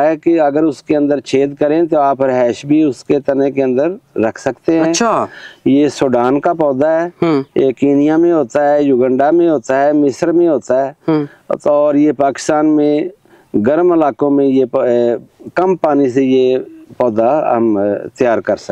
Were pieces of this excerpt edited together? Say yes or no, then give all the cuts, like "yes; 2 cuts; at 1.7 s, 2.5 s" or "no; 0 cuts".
no; 0 cuts